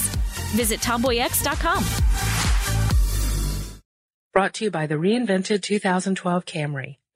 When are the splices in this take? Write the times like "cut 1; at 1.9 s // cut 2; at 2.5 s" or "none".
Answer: cut 1; at 3.8 s